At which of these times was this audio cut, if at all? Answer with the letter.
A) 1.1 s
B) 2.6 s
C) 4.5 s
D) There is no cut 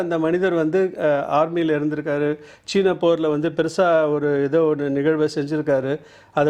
D